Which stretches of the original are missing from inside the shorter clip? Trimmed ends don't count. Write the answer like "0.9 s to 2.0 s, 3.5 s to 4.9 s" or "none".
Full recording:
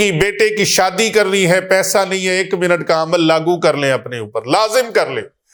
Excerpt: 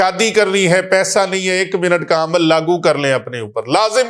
none